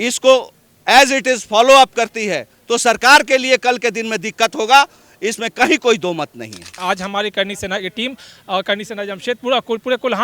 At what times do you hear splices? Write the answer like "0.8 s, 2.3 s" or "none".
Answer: 6.8 s

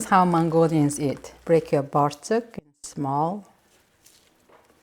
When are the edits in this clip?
1.3 s

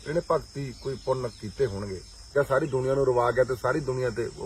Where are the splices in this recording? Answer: 2.2 s

